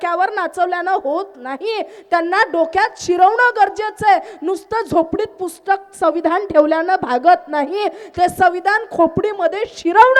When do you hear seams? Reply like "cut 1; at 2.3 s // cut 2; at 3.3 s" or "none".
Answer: none